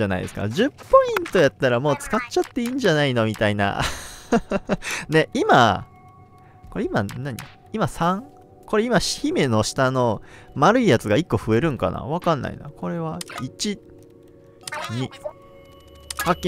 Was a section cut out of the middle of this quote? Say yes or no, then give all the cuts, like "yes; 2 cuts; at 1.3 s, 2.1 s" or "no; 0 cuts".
no; 0 cuts